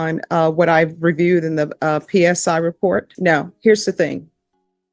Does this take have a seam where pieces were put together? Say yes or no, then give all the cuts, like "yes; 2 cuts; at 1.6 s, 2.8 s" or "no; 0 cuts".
yes; 1 cut; at 3.1 s